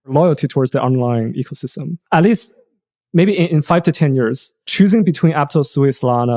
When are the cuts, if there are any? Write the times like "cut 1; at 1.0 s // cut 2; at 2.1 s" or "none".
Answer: none

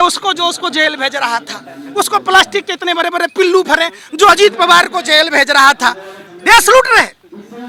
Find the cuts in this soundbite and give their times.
none

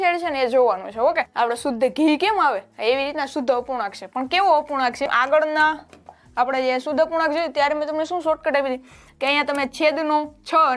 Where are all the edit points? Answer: cut 1; at 1.3 s // cut 2; at 5.1 s

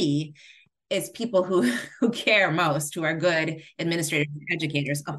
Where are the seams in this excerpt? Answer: none

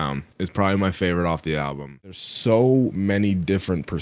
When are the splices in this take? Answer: cut 1; at 2.1 s

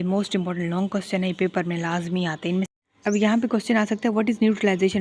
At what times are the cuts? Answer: cut 1; at 2.7 s

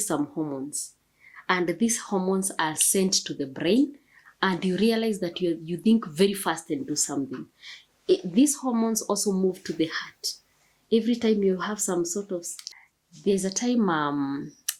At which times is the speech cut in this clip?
cut 1; at 12.6 s

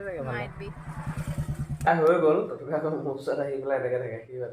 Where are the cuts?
cut 1; at 1.9 s

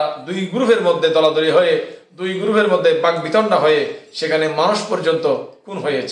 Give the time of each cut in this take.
none

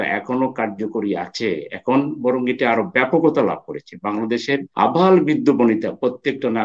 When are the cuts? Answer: cut 1; at 4.7 s

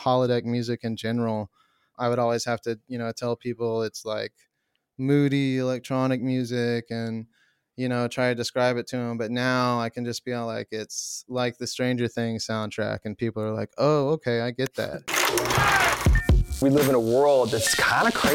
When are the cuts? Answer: cut 1; at 15.0 s

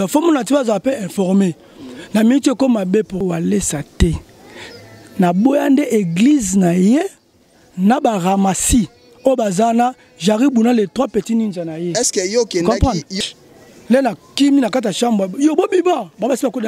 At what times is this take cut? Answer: cut 1; at 3.2 s // cut 2; at 13.1 s

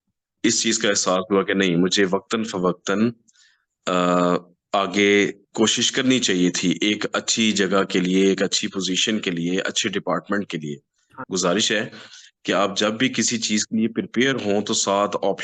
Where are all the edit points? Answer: cut 1; at 11.1 s

